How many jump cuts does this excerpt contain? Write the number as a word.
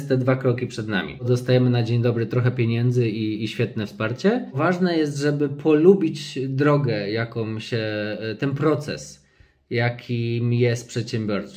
two